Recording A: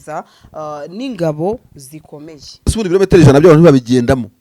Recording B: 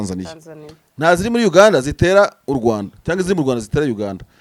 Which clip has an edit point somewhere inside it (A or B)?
A